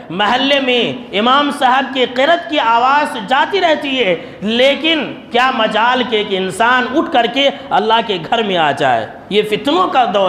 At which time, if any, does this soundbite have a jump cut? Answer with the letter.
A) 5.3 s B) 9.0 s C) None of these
C